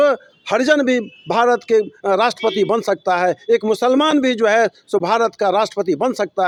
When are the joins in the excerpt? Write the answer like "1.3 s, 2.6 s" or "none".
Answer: none